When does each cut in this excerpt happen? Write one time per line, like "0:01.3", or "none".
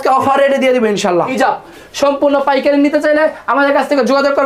0:01.3